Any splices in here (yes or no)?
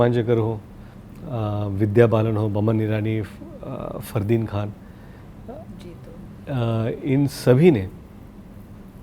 no